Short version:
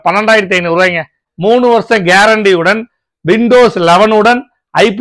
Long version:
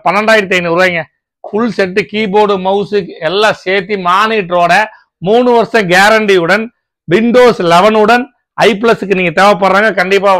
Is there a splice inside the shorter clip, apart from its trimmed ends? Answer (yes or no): yes